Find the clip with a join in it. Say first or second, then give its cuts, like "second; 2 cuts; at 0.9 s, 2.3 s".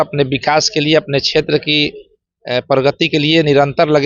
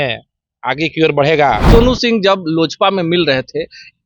second; 1 cut; at 1.6 s